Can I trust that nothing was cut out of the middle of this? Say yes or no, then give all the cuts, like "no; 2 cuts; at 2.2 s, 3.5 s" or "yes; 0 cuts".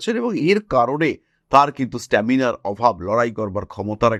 yes; 0 cuts